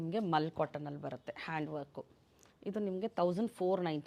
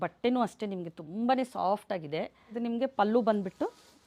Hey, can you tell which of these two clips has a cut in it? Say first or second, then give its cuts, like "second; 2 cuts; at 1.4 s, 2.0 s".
second; 1 cut; at 2.4 s